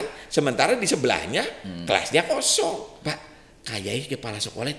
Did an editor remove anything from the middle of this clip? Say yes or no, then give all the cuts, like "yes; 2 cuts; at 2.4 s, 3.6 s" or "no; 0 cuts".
yes; 1 cut; at 2.9 s